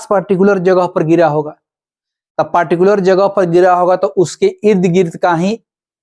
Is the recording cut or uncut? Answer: uncut